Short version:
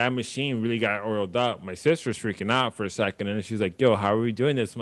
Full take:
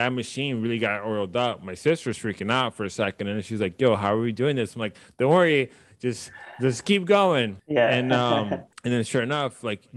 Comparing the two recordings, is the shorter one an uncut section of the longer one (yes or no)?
yes